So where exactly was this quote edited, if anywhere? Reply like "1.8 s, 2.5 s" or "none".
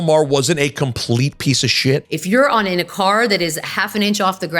2.1 s